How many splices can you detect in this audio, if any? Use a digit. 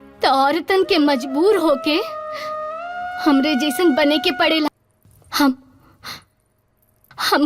1